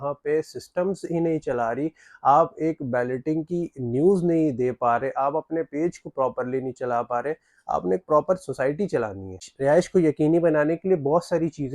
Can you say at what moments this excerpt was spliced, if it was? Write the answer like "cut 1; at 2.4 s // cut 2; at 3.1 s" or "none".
cut 1; at 9.4 s